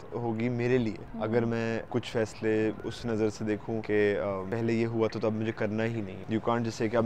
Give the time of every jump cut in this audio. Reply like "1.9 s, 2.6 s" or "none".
1.1 s, 1.9 s, 2.9 s, 3.8 s, 4.5 s, 6.1 s